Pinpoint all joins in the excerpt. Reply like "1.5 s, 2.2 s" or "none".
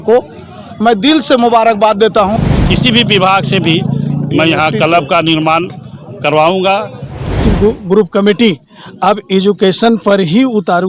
2.4 s, 7.4 s